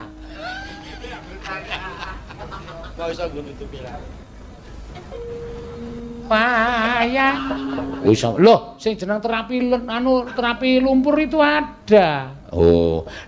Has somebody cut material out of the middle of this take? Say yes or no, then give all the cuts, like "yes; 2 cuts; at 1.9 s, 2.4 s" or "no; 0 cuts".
yes; 1 cut; at 7.3 s